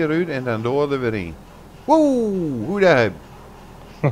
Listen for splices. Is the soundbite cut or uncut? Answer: uncut